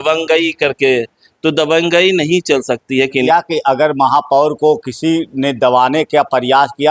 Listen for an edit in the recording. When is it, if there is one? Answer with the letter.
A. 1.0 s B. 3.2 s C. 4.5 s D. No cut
B